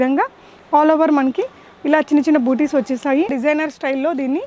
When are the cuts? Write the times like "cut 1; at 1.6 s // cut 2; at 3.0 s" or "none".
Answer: cut 1; at 3.3 s